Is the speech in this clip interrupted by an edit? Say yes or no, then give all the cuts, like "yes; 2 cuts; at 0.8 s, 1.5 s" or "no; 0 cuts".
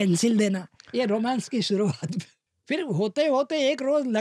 yes; 1 cut; at 2.5 s